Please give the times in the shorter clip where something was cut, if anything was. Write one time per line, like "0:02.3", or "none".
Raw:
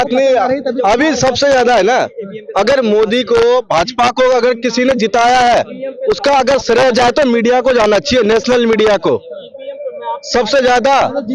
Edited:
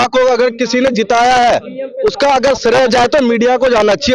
none